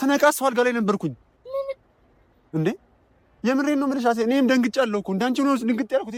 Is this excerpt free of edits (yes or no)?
yes